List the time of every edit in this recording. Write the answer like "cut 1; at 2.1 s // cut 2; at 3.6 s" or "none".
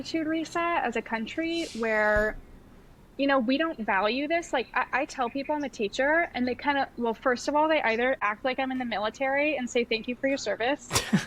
none